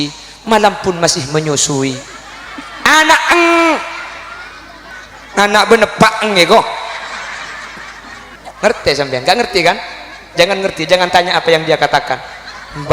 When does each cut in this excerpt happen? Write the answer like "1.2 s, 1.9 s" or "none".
4.9 s, 8.3 s